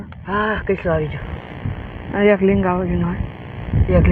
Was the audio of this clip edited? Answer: no; 0 cuts

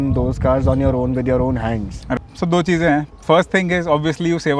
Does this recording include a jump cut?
yes; 1 cut; at 2.0 s

